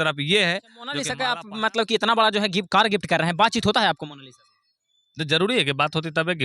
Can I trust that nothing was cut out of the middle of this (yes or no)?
no